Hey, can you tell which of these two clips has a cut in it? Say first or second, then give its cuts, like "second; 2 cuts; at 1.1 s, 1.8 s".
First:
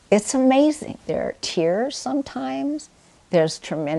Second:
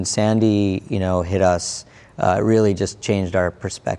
first; 1 cut; at 0.9 s